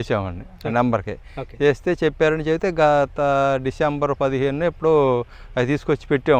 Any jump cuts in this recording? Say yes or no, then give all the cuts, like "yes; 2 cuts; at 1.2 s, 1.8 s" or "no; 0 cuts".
no; 0 cuts